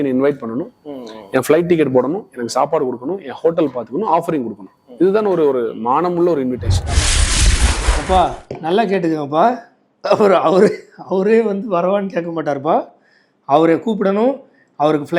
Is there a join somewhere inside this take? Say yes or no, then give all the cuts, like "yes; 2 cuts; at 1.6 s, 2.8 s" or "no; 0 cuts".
yes; 1 cut; at 4.7 s